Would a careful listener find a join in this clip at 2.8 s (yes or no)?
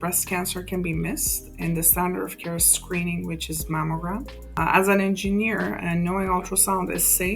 no